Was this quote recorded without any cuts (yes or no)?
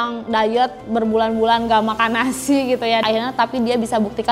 yes